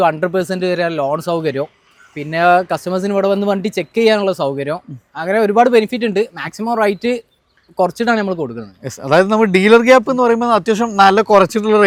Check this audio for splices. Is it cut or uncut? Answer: uncut